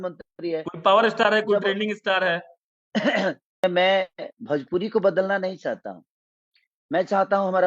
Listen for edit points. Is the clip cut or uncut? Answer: cut